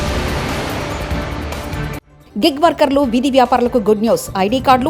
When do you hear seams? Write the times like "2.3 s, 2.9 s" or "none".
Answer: none

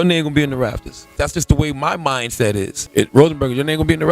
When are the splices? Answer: 1.1 s, 2.8 s

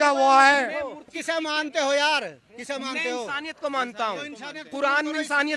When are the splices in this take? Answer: 1.1 s

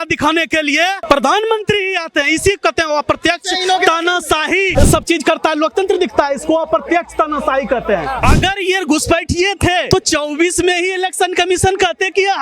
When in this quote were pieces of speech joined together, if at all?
1.0 s, 4.7 s, 8.2 s, 9.9 s

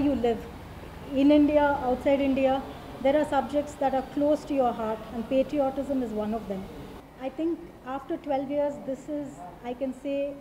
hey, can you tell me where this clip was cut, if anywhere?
7.1 s

